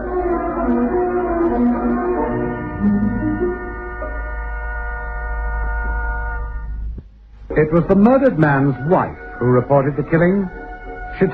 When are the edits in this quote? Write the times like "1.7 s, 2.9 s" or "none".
5.1 s